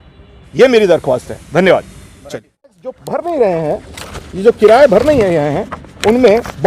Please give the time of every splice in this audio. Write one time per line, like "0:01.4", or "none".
0:02.9